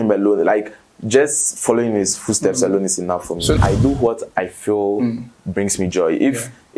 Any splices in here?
yes; 1 cut; at 3.6 s

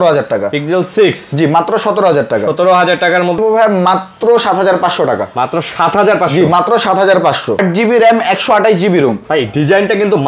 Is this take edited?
yes; 2 cuts; at 3.4 s, 7.6 s

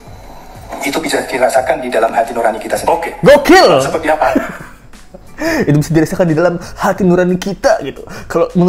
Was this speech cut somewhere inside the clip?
no; 0 cuts

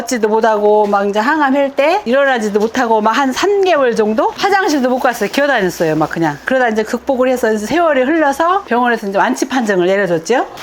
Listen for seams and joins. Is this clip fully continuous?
yes; 0 cuts

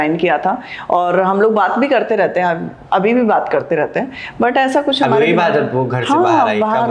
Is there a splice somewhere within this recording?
no; 0 cuts

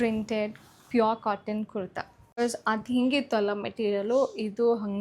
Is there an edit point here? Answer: yes; 1 cut; at 2.4 s

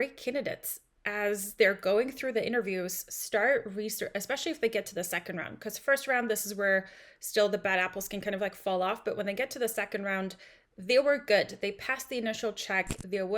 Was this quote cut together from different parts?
no; 0 cuts

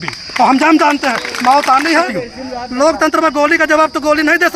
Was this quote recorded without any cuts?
no; 1 cut; at 2.1 s

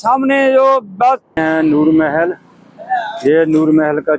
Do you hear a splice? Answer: yes; 1 cut; at 1.4 s

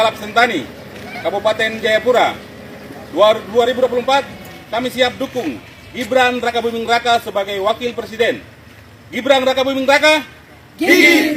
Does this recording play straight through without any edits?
yes; 0 cuts

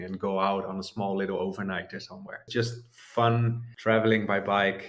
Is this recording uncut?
no; 2 cuts; at 2.5 s, 3.6 s

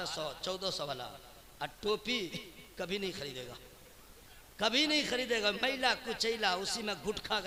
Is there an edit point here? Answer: no; 0 cuts

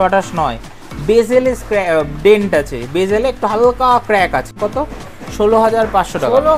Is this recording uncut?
no; 1 cut; at 4.5 s

